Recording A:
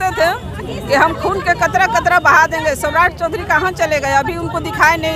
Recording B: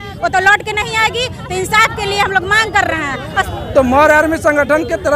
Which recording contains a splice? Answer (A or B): B